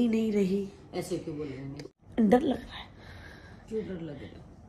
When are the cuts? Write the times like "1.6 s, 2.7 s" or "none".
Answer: 1.7 s